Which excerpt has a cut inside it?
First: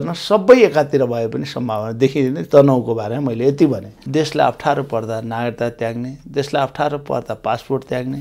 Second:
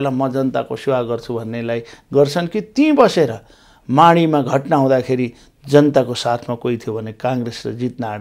first; 2 cuts; at 2.4 s, 3.9 s

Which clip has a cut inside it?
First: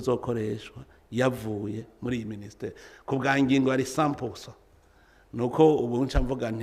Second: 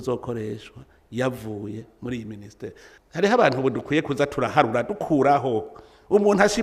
second; 1 cut; at 2.9 s

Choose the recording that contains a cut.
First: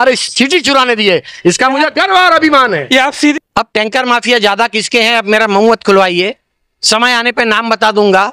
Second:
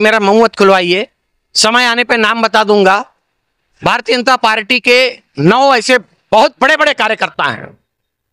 first; 1 cut; at 3.3 s

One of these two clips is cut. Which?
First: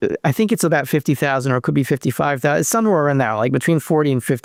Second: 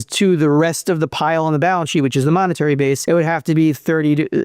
second; 1 cut; at 3.0 s

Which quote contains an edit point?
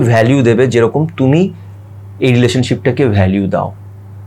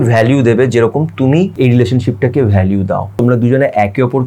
second; 2 cuts; at 1.5 s, 3.2 s

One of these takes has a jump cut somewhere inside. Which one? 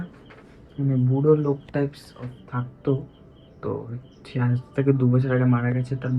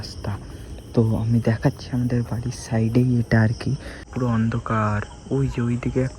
second; 1 cut; at 4.0 s

